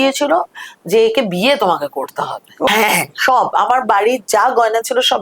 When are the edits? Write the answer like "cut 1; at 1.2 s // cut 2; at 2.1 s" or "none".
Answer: cut 1; at 2.7 s